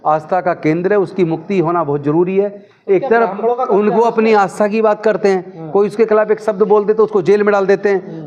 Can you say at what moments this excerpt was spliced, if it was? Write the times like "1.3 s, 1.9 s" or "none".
none